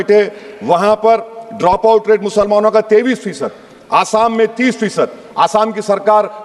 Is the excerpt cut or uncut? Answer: uncut